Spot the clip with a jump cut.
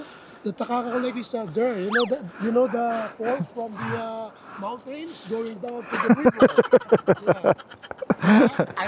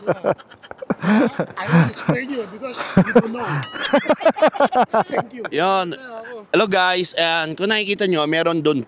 second; 1 cut; at 5.4 s

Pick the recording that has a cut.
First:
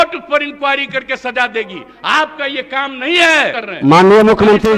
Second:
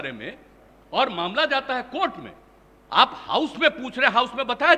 first; 1 cut; at 3.6 s

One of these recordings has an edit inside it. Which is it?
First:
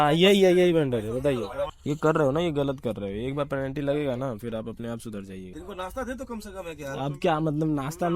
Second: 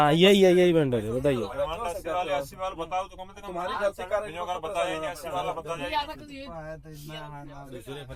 first; 2 cuts; at 1.7 s, 5.5 s

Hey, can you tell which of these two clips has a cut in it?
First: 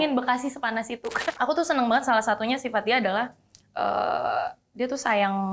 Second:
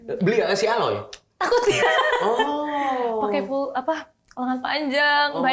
first; 1 cut; at 1.2 s

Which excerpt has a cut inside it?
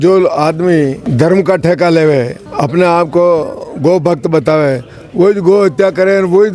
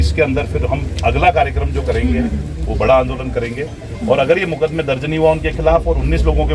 first; 2 cuts; at 1.0 s, 2.4 s

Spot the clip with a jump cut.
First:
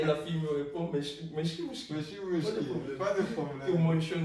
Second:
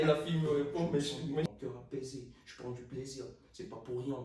second; 1 cut; at 1.4 s

